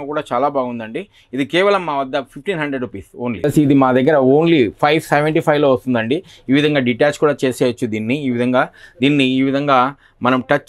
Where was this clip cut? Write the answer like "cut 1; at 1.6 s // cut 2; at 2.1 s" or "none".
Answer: cut 1; at 3.5 s

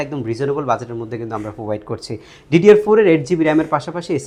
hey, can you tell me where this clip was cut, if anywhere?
none

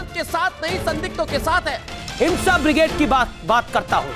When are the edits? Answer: cut 1; at 2.0 s

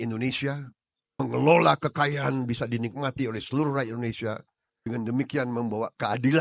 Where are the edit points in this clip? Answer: none

